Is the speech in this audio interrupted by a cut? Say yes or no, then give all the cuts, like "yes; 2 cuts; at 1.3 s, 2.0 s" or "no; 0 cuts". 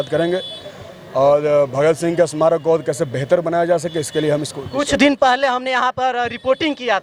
no; 0 cuts